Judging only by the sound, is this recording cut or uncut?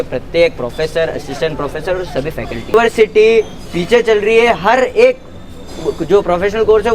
cut